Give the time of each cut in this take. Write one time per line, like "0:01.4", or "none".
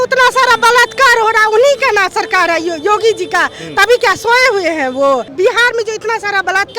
0:05.3

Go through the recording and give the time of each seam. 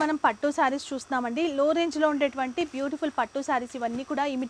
none

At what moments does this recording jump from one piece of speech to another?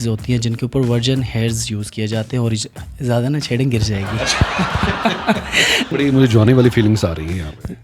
0:05.9

